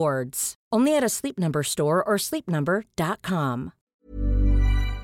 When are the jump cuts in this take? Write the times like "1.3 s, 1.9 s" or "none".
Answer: 3.8 s